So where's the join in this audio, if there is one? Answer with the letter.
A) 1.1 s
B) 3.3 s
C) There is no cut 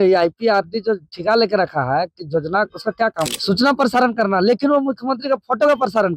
B